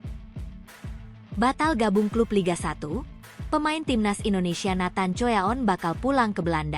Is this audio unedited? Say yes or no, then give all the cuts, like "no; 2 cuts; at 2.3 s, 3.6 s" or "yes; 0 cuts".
no; 1 cut; at 1.4 s